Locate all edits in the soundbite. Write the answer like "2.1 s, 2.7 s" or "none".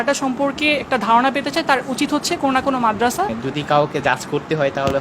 3.4 s